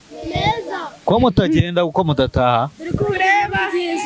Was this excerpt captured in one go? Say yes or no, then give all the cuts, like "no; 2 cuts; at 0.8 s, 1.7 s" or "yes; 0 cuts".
yes; 0 cuts